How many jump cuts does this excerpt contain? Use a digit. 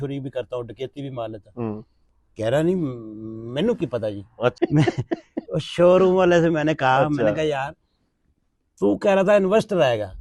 1